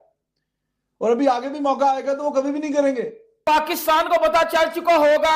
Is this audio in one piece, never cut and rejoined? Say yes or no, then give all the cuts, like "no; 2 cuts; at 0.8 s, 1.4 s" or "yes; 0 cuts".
yes; 0 cuts